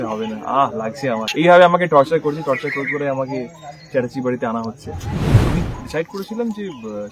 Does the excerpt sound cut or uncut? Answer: cut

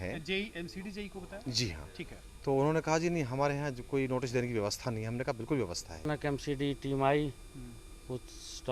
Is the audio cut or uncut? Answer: cut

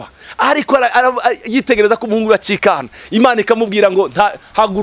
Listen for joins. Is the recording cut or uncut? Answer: uncut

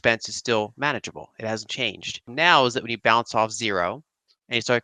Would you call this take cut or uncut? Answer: cut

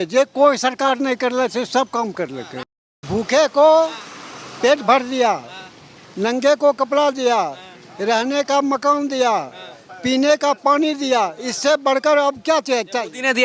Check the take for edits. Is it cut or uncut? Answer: cut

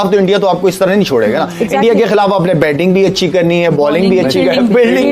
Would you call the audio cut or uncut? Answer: uncut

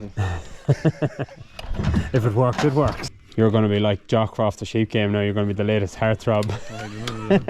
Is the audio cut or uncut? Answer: cut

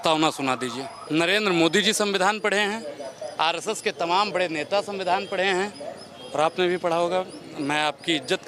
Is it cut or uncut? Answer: cut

